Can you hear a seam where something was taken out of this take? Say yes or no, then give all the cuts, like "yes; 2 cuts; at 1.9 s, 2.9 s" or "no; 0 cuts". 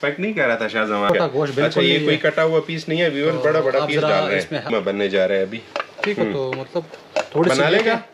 yes; 2 cuts; at 1.1 s, 4.6 s